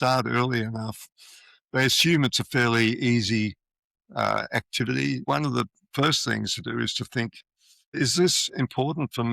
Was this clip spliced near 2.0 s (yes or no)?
no